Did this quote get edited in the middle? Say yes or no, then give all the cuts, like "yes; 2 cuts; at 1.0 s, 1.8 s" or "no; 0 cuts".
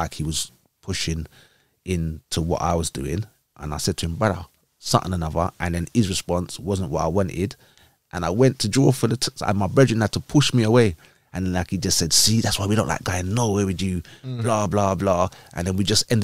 no; 0 cuts